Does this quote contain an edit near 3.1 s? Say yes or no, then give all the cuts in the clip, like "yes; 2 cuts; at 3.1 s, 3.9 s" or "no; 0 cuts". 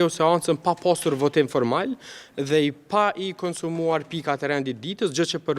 no; 0 cuts